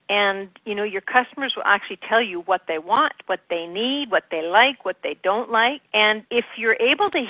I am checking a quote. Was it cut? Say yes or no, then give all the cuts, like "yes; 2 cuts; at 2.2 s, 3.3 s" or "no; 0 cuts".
yes; 1 cut; at 6.1 s